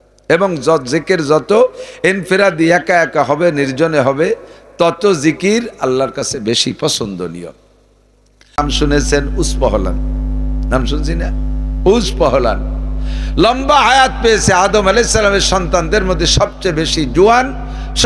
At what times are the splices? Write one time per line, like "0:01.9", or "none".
0:08.6